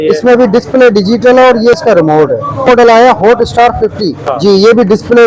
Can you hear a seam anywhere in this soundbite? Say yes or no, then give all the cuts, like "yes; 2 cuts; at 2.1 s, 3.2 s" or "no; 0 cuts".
yes; 2 cuts; at 2.7 s, 4.3 s